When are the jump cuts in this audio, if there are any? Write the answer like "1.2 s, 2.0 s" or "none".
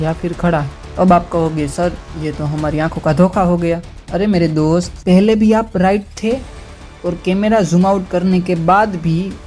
5.0 s